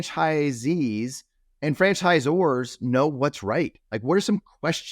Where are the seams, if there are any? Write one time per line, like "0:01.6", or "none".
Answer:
0:01.5